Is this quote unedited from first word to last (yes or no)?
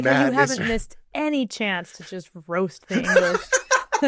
yes